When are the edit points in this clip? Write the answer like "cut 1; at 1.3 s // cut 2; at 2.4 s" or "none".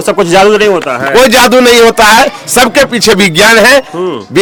none